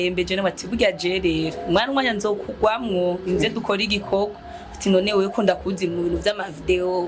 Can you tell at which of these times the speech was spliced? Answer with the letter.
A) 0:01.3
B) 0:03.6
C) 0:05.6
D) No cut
D